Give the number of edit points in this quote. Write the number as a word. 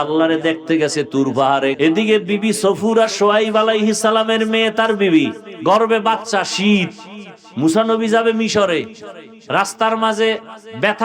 two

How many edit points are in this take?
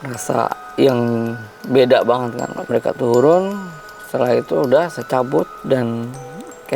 two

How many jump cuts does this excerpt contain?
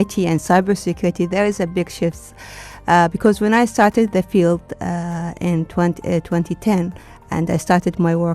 zero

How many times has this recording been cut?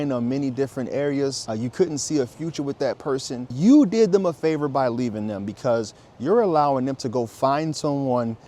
two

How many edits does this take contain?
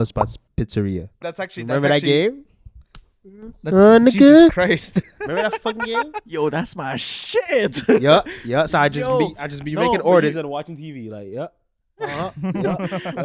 one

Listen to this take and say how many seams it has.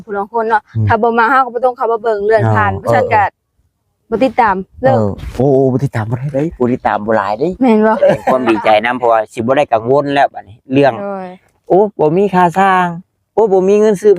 one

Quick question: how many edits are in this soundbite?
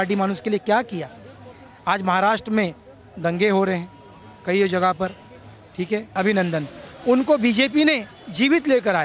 zero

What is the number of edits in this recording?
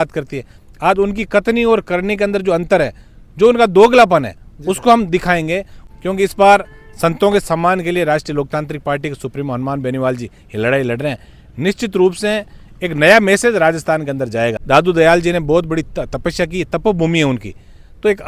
two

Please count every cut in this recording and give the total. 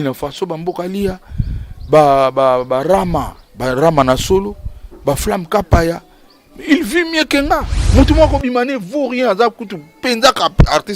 one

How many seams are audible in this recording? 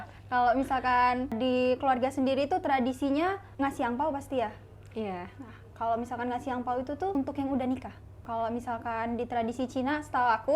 four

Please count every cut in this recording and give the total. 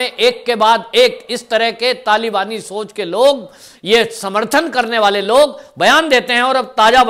zero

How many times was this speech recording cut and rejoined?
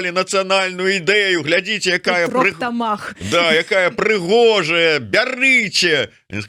zero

